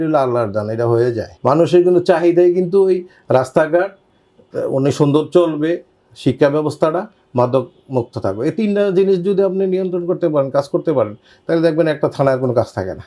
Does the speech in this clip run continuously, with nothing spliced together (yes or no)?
no